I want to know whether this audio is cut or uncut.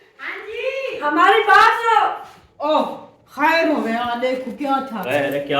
cut